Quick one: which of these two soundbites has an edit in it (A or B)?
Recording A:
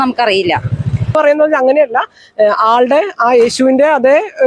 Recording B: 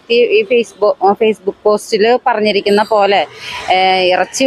A